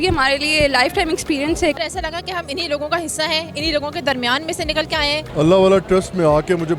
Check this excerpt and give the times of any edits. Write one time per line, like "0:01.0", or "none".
0:01.8
0:05.3